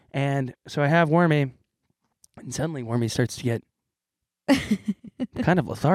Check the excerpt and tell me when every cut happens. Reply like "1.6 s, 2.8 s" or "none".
none